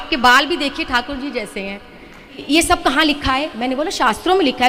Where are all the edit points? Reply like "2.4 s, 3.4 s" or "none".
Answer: 2.4 s